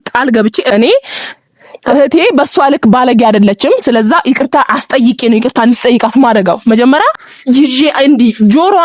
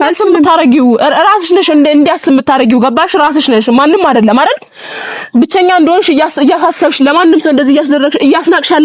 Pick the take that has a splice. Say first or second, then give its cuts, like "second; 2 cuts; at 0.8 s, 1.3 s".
first; 2 cuts; at 0.7 s, 7.2 s